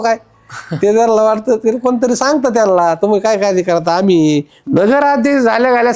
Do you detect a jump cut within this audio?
yes; 1 cut; at 4.5 s

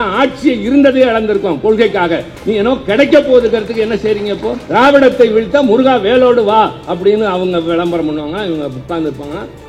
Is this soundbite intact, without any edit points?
no; 1 cut; at 4.6 s

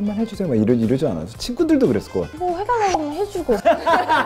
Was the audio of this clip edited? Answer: yes; 1 cut; at 2.3 s

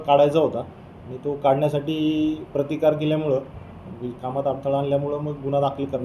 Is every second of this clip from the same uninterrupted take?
yes; 0 cuts

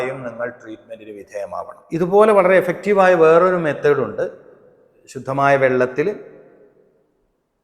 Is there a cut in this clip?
yes; 1 cut; at 1.8 s

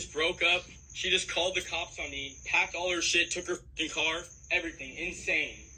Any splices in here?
no; 0 cuts

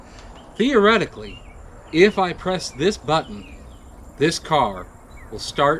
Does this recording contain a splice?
no; 0 cuts

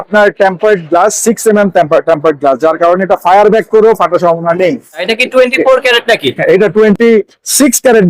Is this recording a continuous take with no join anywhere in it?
no; 1 cut; at 5.0 s

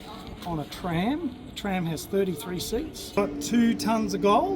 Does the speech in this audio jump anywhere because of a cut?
yes; 1 cut; at 3.2 s

